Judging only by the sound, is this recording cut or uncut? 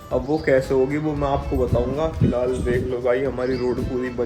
uncut